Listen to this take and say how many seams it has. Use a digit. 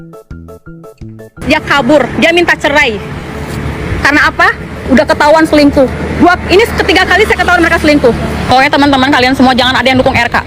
2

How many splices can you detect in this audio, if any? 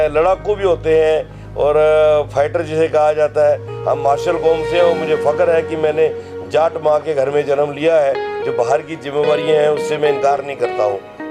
1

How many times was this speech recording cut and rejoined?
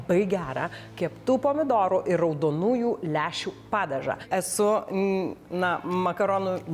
1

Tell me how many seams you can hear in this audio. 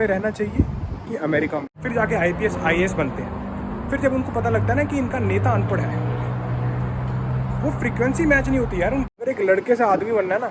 2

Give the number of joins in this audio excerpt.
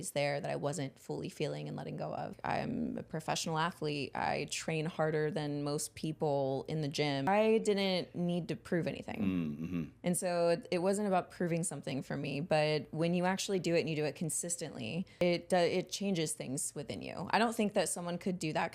3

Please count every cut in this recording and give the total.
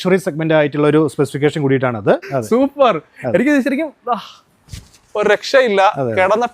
1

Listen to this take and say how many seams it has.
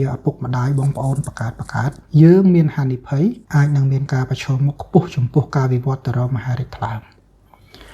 2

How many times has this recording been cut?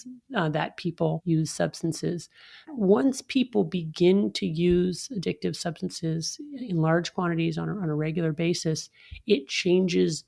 2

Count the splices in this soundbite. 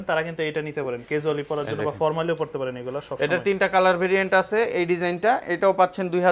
0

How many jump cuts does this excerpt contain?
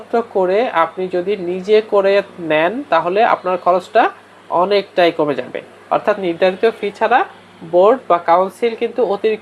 0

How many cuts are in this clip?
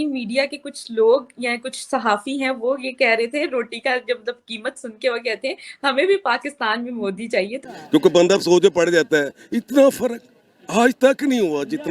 1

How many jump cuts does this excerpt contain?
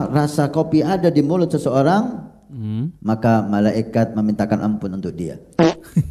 0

